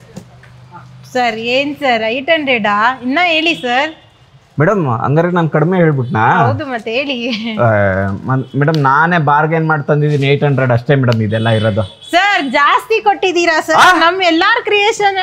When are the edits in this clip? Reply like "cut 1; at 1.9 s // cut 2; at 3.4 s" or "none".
none